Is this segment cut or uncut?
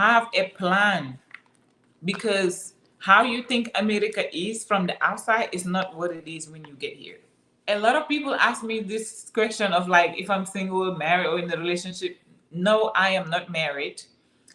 cut